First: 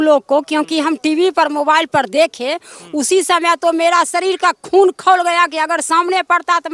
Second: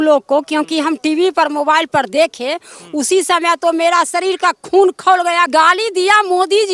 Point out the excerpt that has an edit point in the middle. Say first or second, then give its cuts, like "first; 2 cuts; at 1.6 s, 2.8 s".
second; 1 cut; at 5.5 s